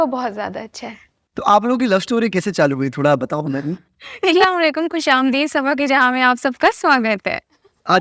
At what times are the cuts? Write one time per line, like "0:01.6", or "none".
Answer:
0:04.4